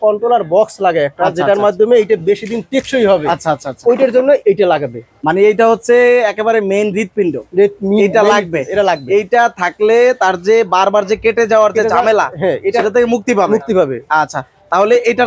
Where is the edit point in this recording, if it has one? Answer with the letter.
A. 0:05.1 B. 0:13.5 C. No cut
C